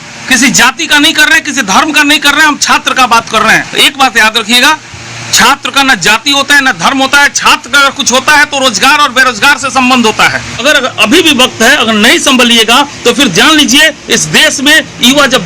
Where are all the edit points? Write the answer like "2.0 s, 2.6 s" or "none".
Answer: 3.7 s, 10.6 s